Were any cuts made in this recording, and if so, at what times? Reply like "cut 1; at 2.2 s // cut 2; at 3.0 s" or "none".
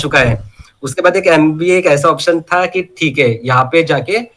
none